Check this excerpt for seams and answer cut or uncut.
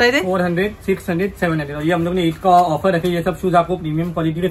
uncut